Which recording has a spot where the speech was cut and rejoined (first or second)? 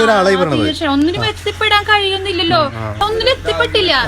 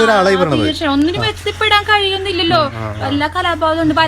first